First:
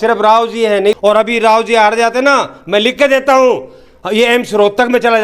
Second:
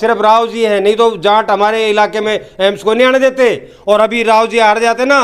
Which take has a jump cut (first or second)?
first